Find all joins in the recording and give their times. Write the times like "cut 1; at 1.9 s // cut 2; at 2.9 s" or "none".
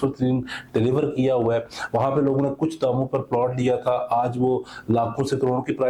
none